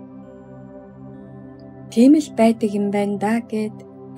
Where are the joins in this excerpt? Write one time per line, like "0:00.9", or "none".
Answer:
0:01.9